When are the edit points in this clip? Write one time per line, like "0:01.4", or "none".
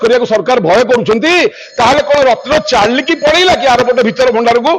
none